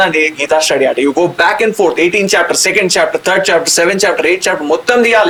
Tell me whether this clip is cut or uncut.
uncut